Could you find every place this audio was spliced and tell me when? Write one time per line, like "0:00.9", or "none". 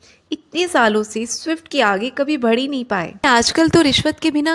0:03.2